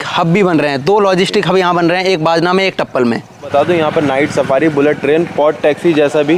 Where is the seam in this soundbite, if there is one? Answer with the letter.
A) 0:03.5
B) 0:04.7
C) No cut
A